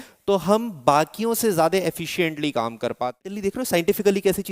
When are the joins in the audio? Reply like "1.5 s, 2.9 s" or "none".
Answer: 3.3 s